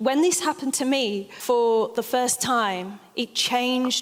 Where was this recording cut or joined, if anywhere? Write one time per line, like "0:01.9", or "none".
0:01.3